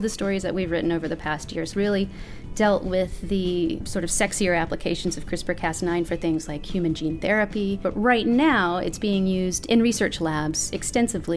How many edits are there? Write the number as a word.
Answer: three